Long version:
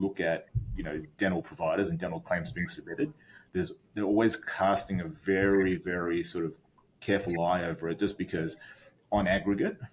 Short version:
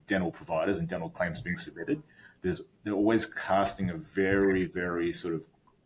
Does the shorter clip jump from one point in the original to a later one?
no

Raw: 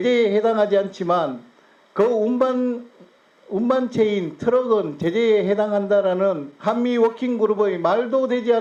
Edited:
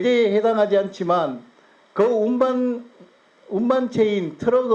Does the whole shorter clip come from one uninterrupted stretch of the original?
yes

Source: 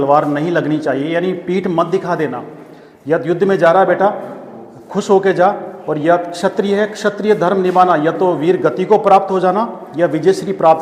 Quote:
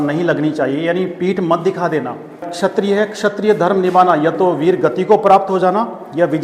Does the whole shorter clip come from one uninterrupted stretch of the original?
no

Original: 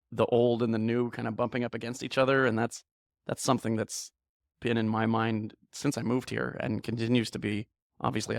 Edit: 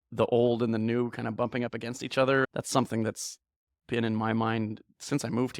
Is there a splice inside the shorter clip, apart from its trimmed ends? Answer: yes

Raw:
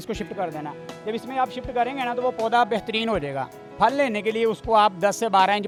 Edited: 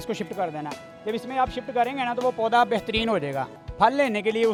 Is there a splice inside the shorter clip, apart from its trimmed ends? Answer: no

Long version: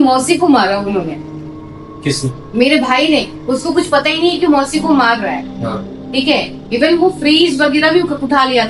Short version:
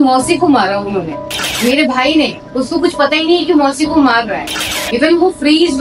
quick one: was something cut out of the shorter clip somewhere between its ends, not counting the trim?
yes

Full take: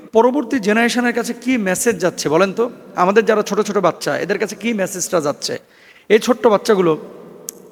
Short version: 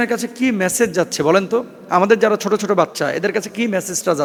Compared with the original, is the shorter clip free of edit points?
yes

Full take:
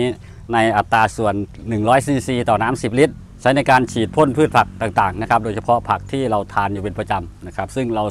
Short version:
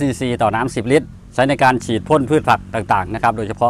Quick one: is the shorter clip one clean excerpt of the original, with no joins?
yes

